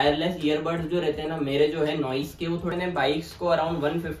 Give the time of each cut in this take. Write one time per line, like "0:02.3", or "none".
0:02.7